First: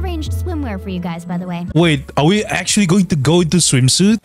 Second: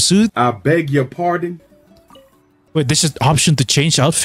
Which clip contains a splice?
second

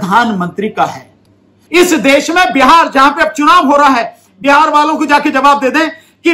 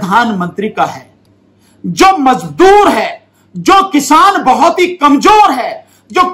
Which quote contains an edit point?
first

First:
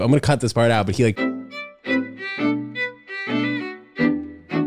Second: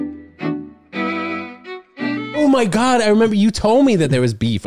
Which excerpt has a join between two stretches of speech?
second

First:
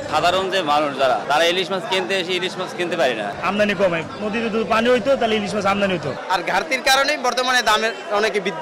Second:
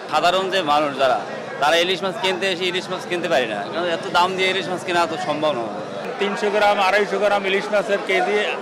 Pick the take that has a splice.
first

